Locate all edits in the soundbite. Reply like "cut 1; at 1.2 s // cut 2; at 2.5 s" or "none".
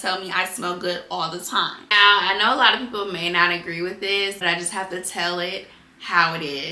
cut 1; at 1.8 s // cut 2; at 4.4 s